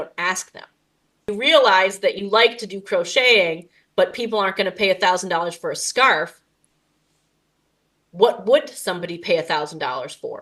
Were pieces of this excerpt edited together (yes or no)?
yes